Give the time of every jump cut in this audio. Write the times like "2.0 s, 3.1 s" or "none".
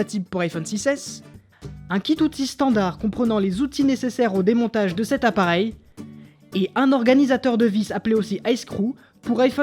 none